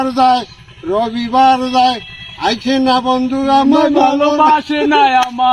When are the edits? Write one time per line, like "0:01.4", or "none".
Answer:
none